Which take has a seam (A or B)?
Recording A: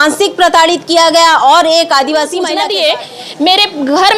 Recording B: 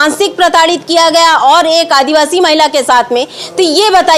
A